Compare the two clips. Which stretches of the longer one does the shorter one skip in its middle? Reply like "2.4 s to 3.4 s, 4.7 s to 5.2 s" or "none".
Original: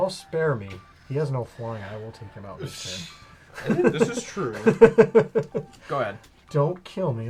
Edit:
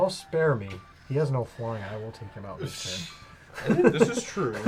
none